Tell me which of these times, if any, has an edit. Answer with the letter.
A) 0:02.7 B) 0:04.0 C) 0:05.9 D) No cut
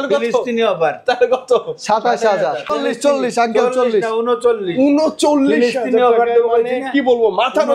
A